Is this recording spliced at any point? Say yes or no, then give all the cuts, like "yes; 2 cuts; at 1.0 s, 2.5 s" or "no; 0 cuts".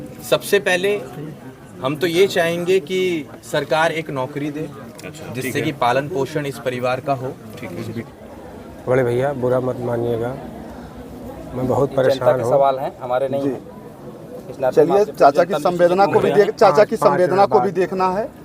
yes; 1 cut; at 8.1 s